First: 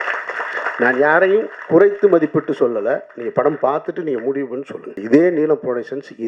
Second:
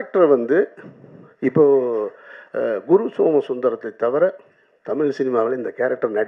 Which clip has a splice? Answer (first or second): first